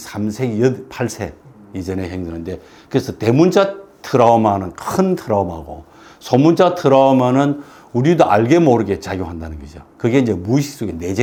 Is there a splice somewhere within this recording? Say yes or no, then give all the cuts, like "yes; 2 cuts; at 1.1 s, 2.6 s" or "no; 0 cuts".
no; 0 cuts